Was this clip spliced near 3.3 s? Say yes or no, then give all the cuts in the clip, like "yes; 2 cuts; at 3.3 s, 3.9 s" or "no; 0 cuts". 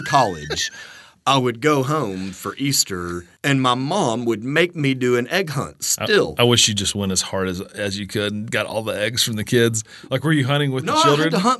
yes; 1 cut; at 3.3 s